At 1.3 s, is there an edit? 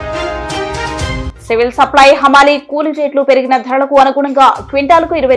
yes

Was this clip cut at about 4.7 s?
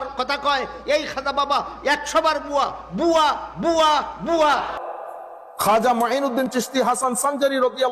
yes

